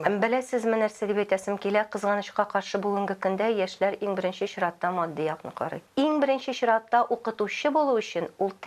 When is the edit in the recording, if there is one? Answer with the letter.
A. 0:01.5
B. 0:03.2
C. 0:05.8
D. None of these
C